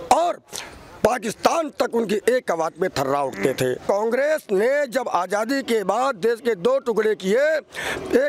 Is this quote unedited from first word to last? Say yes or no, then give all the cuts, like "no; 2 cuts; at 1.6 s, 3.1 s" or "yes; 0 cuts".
no; 1 cut; at 3.8 s